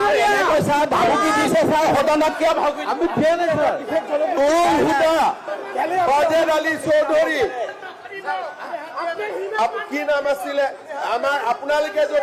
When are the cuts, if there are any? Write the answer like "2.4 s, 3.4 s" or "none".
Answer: none